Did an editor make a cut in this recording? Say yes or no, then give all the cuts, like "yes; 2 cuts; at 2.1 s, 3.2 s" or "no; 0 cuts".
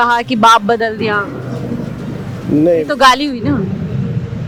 no; 0 cuts